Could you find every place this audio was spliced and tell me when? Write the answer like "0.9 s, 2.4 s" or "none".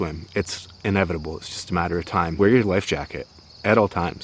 2.3 s

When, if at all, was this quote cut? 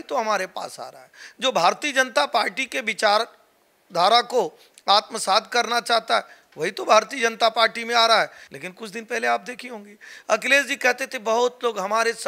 8.4 s

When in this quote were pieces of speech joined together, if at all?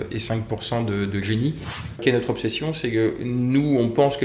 2.0 s

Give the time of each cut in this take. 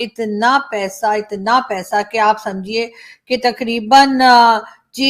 none

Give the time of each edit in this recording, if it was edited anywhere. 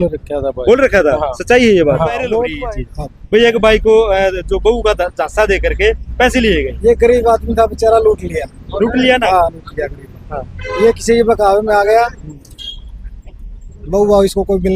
2.5 s

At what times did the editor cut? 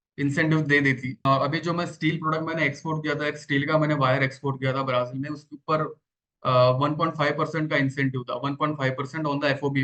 1.2 s

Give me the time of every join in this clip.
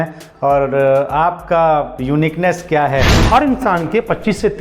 3.2 s

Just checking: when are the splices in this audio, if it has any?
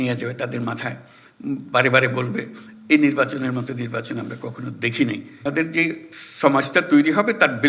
5.4 s

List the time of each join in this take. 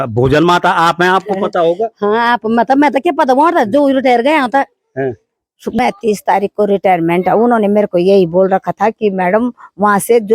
5.8 s

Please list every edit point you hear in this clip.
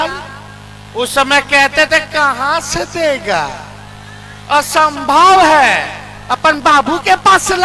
none

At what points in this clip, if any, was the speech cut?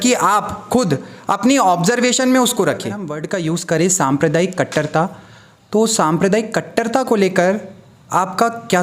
3.2 s

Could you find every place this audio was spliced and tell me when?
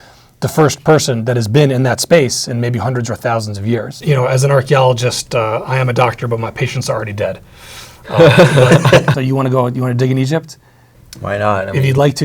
4.0 s, 9.1 s

